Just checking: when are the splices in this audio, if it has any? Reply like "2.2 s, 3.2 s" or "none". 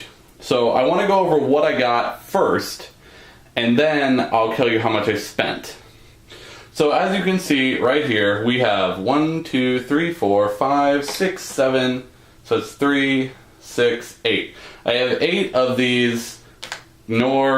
7.8 s